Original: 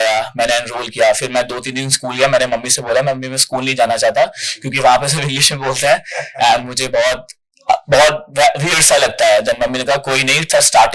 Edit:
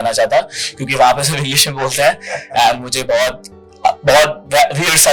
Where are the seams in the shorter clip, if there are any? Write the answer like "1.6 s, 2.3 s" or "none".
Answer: none